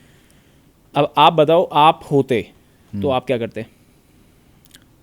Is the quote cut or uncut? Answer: uncut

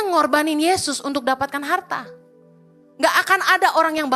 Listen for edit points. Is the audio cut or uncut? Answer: uncut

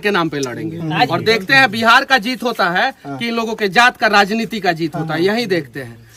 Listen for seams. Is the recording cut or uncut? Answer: uncut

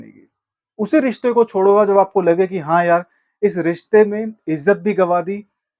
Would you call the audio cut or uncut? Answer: uncut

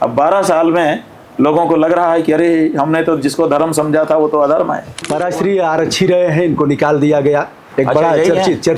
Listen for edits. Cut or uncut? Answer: cut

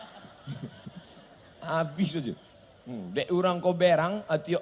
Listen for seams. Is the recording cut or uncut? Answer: uncut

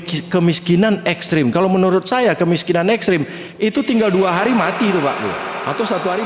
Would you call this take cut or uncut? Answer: uncut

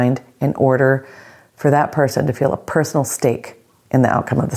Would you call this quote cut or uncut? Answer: uncut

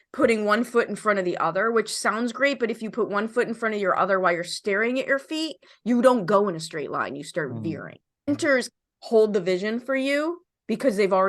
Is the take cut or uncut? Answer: cut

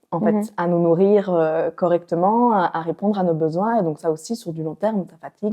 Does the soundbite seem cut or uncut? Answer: uncut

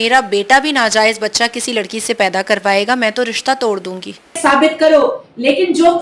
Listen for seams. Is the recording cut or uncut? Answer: cut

